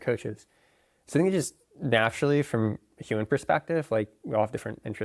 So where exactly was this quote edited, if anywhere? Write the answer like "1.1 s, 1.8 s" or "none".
none